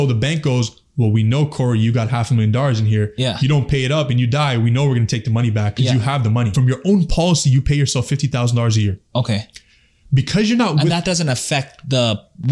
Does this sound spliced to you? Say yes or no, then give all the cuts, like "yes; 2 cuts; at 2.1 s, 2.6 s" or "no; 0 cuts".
yes; 1 cut; at 6.5 s